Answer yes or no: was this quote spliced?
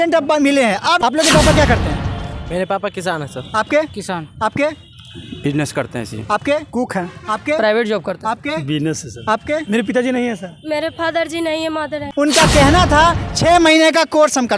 yes